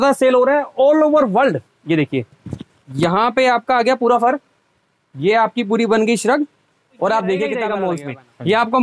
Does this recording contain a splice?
yes; 1 cut; at 7.7 s

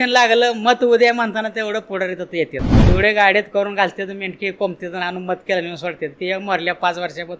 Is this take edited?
yes; 1 cut; at 2.8 s

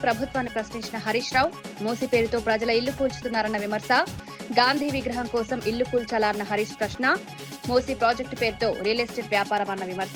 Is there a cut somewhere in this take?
no; 0 cuts

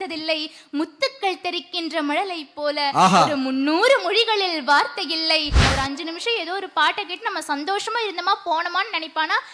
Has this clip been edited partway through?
yes; 1 cut; at 5.6 s

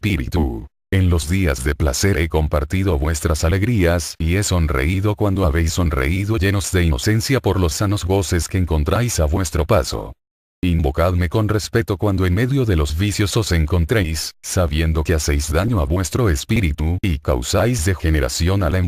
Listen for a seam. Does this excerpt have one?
no; 0 cuts

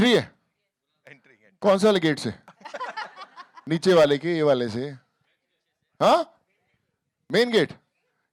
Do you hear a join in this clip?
no; 0 cuts

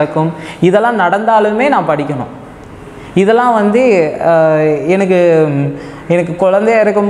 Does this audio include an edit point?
no; 0 cuts

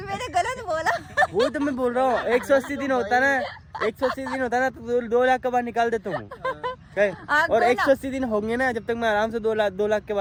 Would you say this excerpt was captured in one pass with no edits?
yes; 0 cuts

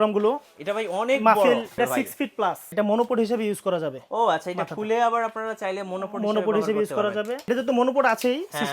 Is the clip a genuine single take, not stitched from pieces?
no; 3 cuts; at 1.8 s, 2.7 s, 7.5 s

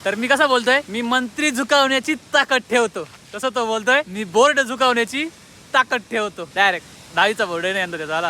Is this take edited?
yes; 3 cuts; at 0.9 s, 4.2 s, 6.4 s

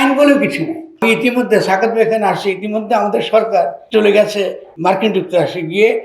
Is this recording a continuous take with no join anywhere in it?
no; 3 cuts; at 1.0 s, 3.8 s, 4.7 s

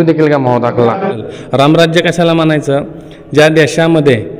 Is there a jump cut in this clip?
yes; 1 cut; at 1.2 s

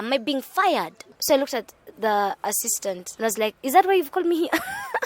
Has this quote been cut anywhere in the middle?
yes; 2 cuts; at 1.1 s, 3.1 s

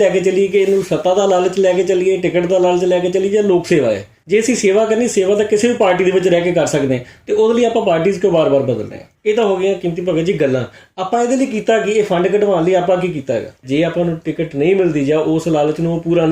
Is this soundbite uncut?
no; 3 cuts; at 4.1 s, 9.1 s, 13.6 s

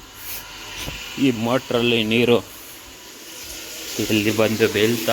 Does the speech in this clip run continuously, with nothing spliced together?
yes; 0 cuts

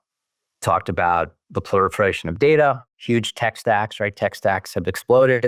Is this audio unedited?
yes; 0 cuts

